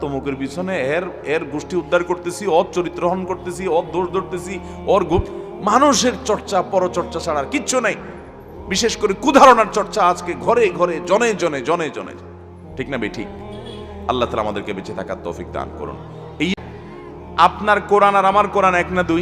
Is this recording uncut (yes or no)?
no